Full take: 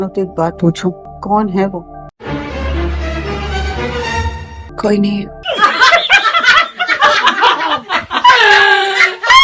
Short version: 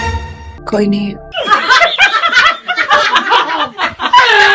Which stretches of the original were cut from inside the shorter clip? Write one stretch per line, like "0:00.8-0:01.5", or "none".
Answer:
none